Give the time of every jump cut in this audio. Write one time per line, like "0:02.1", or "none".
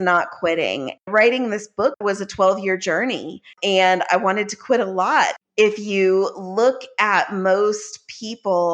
0:01.1
0:02.0
0:03.5
0:05.3